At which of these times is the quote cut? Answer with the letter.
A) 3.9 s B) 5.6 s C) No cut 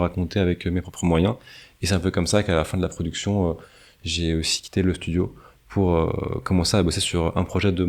C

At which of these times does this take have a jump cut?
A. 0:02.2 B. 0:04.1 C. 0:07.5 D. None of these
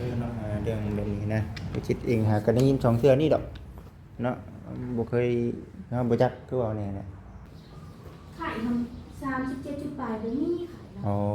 C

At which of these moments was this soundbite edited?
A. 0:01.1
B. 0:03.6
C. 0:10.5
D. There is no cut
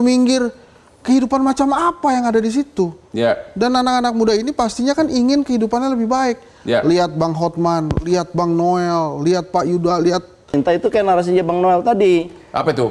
C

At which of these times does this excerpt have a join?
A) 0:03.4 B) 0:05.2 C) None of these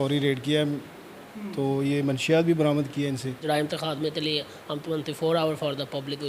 A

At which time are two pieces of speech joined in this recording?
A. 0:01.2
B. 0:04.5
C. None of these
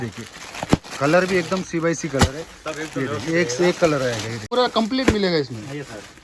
B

